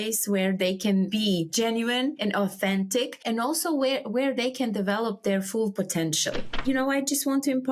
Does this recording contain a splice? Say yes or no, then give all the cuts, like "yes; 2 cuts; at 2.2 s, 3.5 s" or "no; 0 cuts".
yes; 1 cut; at 6.5 s